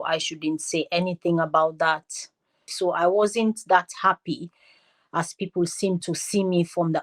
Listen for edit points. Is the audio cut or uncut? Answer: cut